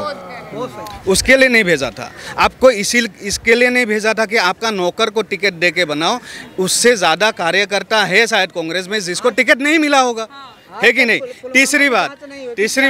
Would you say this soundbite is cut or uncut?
uncut